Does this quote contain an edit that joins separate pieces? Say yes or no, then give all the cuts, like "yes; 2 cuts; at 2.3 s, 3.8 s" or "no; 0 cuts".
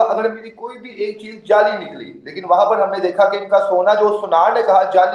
no; 0 cuts